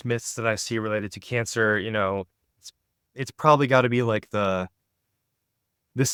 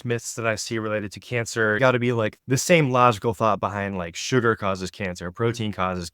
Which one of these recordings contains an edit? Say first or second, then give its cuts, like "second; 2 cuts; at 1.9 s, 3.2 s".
second; 1 cut; at 1.8 s